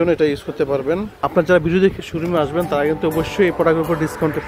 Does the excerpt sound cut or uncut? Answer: cut